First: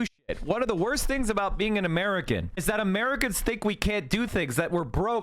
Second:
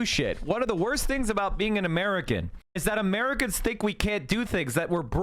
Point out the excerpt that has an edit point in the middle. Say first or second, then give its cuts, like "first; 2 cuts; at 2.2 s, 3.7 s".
first; 1 cut; at 2.5 s